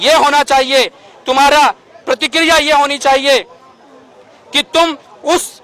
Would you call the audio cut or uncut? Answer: uncut